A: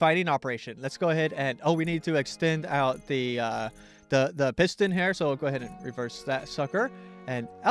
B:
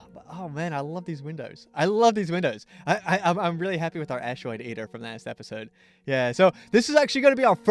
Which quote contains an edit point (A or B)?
A